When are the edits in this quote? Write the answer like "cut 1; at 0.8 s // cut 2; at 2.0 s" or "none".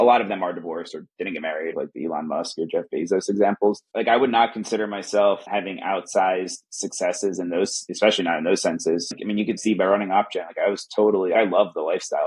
cut 1; at 1.7 s // cut 2; at 3.9 s // cut 3; at 7.8 s // cut 4; at 9.1 s // cut 5; at 11.3 s